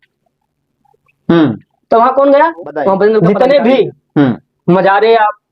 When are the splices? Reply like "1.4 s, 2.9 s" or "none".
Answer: 3.2 s